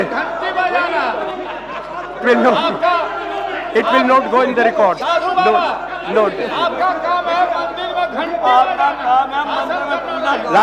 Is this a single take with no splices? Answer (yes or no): yes